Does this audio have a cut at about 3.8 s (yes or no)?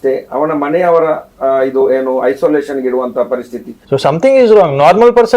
yes